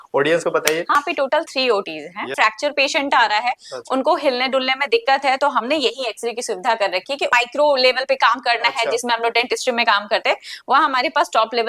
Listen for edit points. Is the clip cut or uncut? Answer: cut